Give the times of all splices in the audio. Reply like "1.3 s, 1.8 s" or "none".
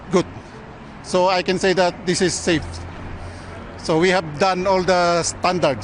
none